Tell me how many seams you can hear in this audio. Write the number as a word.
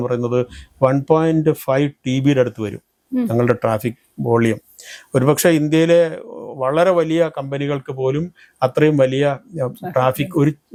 zero